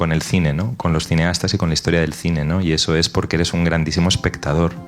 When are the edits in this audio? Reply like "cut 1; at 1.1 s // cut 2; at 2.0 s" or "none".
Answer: none

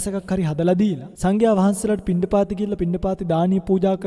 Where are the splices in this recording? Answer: cut 1; at 1.1 s

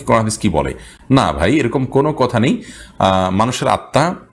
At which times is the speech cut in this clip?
none

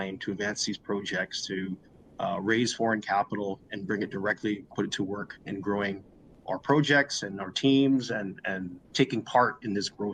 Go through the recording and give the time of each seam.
none

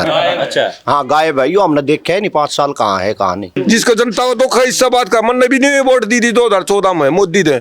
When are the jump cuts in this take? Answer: cut 1; at 3.6 s

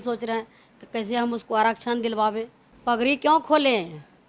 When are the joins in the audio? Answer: cut 1; at 2.6 s

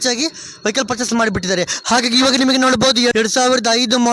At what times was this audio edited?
cut 1; at 1.8 s // cut 2; at 3.1 s

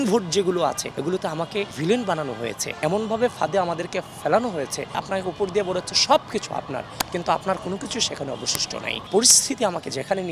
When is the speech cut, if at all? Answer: cut 1; at 1.3 s // cut 2; at 2.8 s // cut 3; at 5.0 s // cut 4; at 9.0 s

